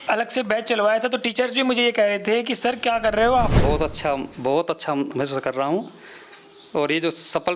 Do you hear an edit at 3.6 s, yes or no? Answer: yes